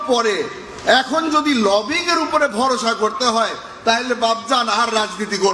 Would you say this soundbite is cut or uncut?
uncut